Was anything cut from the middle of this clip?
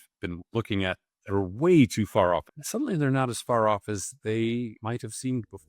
yes; 2 cuts; at 2.6 s, 4.8 s

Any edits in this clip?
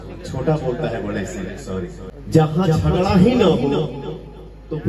yes; 1 cut; at 2.1 s

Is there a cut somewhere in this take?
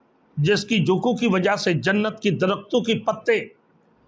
no; 0 cuts

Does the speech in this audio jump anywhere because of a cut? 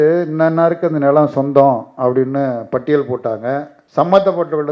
yes; 1 cut; at 3.8 s

